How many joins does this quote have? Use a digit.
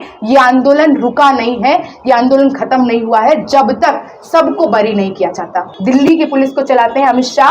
1